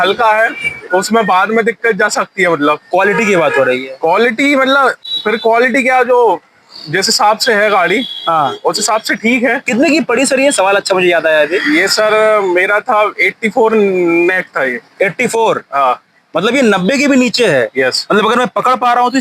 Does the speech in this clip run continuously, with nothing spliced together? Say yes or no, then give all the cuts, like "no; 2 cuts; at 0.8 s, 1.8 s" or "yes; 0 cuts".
yes; 0 cuts